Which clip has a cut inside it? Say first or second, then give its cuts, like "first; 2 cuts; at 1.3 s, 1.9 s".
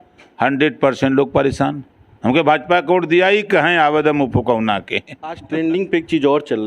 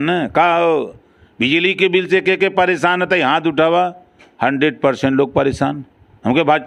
first; 1 cut; at 5.4 s